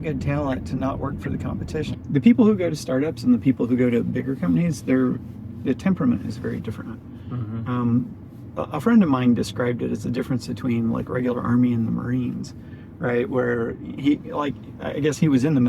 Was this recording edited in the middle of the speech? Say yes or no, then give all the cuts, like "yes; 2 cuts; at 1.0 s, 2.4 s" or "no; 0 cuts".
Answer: yes; 1 cut; at 1.9 s